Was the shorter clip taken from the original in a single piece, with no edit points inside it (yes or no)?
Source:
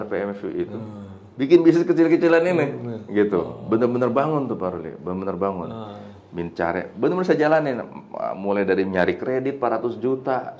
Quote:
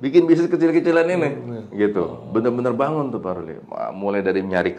no